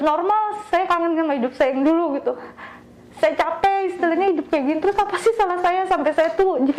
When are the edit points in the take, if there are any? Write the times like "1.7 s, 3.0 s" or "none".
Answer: none